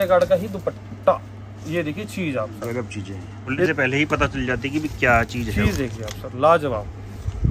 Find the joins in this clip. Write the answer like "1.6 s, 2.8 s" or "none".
3.7 s